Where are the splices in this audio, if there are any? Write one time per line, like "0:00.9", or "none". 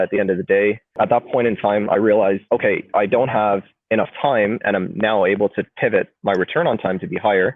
0:01.0
0:02.4